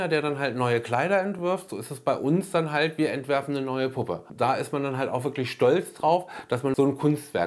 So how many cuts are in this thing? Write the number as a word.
two